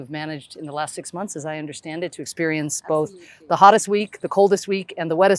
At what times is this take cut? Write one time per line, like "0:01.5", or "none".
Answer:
none